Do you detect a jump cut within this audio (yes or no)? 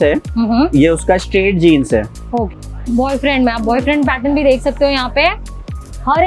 yes